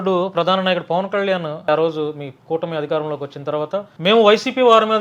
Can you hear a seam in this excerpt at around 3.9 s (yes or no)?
yes